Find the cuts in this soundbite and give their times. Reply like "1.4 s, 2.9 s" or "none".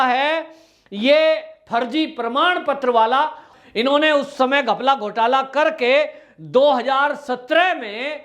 3.5 s